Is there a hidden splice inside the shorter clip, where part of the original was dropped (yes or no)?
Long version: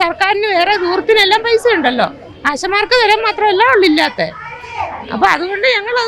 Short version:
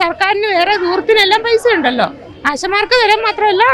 no